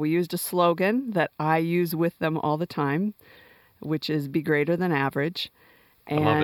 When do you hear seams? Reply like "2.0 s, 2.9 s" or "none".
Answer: 1.3 s